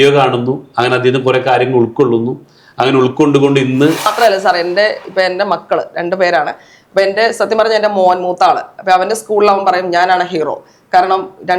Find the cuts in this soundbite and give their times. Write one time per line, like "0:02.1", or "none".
0:04.1

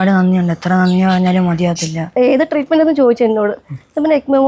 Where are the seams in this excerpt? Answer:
0:02.1

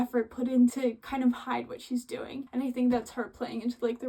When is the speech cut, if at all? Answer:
none

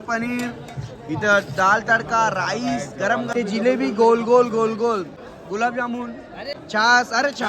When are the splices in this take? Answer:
0:03.3
0:05.2
0:06.5

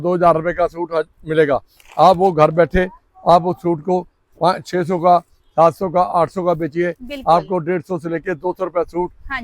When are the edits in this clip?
none

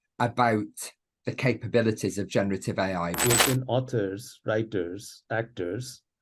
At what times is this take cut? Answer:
0:03.2

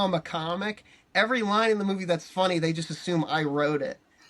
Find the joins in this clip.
none

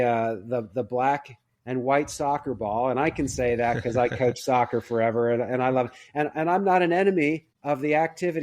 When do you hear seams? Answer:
0:07.5

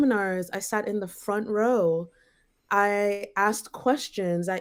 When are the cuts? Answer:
none

